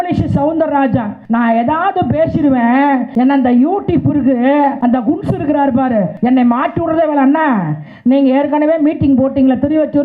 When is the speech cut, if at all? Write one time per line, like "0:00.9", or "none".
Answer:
0:01.1
0:03.1
0:04.8
0:06.1